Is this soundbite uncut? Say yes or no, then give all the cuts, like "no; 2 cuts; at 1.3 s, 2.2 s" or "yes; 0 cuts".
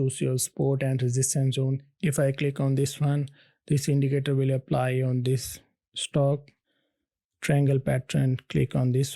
no; 2 cuts; at 2.0 s, 6.6 s